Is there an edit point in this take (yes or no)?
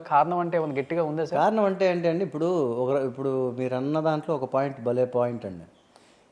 no